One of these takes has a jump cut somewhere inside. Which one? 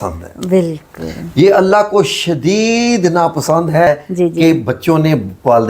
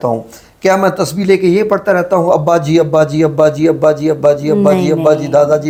first; 1 cut; at 3.9 s

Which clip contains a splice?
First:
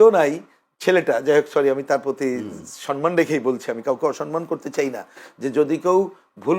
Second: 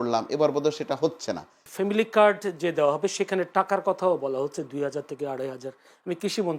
second; 1 cut; at 1.7 s

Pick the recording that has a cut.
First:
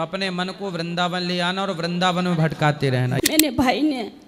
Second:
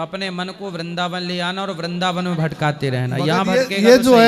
first; 1 cut; at 3.1 s

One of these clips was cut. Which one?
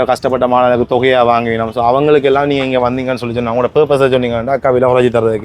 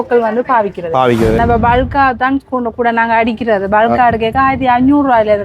second; 1 cut; at 1.4 s

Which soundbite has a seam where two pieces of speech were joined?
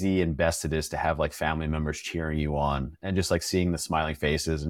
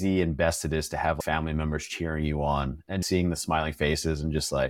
second; 2 cuts; at 1.2 s, 3.0 s

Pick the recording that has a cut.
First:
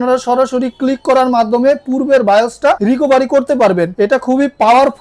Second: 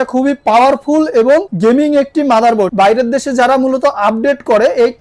second; 1 cut; at 2.7 s

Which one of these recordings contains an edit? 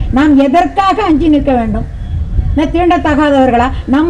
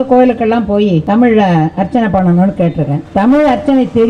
second; 2 cuts; at 1.0 s, 3.0 s

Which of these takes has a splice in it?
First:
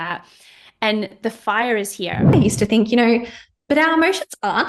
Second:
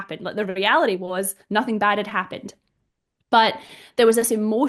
first; 1 cut; at 2.3 s

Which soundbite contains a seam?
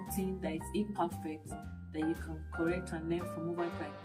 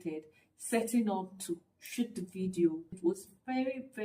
second; 1 cut; at 2.9 s

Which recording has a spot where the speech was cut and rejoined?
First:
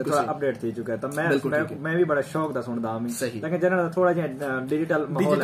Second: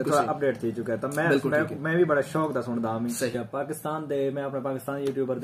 second; 1 cut; at 3.3 s

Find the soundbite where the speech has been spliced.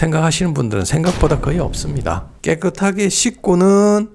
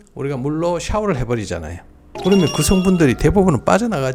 first; 1 cut; at 2.3 s

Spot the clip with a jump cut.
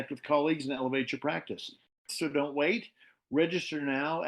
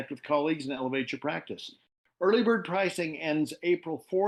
first; 1 cut; at 2.1 s

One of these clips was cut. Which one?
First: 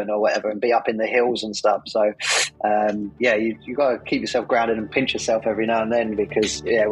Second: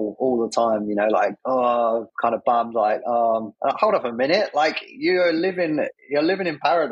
second; 4 cuts; at 1.4 s, 2.1 s, 3.7 s, 5.8 s

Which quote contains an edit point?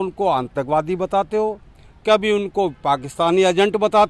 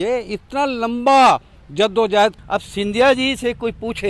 second; 1 cut; at 2.4 s

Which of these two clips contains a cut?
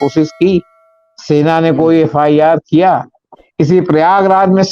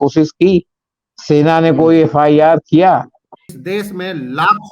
second; 1 cut; at 3.4 s

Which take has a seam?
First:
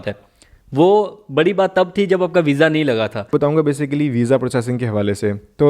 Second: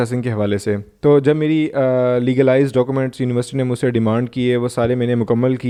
first; 1 cut; at 3.3 s

